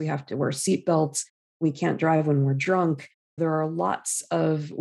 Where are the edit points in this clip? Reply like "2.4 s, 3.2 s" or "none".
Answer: 3.4 s

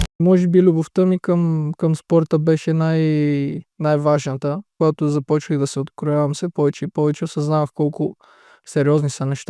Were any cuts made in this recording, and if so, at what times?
4.7 s

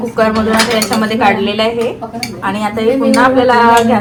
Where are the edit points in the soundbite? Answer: none

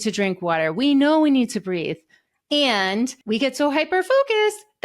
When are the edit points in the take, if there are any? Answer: 3.2 s

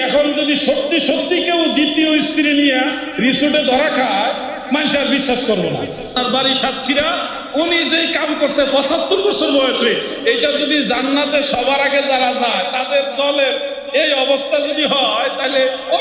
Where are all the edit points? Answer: 6.2 s

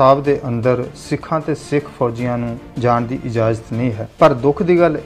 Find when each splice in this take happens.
2.6 s, 4.0 s

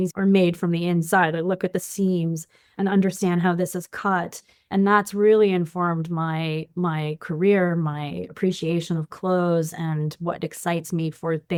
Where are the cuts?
none

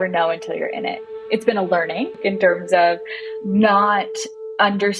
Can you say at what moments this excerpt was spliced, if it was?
1.0 s, 2.2 s

